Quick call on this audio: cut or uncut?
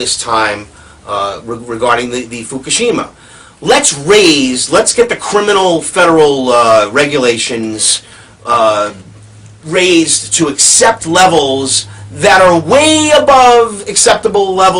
uncut